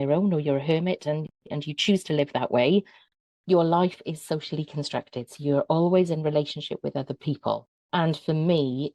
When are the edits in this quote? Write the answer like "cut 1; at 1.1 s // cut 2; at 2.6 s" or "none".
cut 1; at 7.7 s